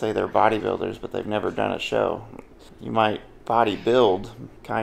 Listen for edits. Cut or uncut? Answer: uncut